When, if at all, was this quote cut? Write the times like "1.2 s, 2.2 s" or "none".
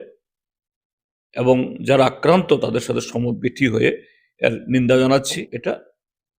5.4 s